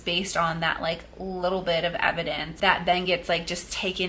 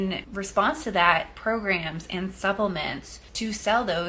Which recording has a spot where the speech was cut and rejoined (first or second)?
first